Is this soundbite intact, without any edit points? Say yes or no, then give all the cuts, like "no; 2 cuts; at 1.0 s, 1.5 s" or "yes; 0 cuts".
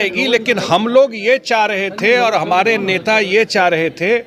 yes; 0 cuts